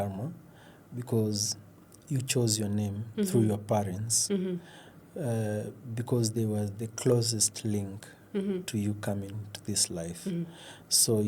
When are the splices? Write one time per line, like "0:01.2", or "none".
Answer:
none